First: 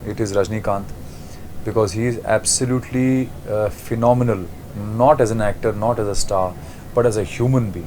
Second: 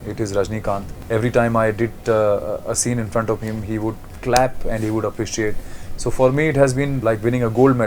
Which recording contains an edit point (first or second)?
second